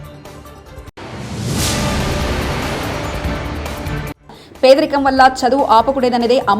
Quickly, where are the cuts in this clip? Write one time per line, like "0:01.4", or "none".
0:00.9
0:04.1